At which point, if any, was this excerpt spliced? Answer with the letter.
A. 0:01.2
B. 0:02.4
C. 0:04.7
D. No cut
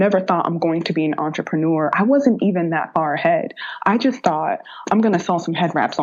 D